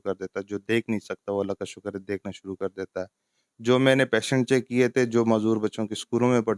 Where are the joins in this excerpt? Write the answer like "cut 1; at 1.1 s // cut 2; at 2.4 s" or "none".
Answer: none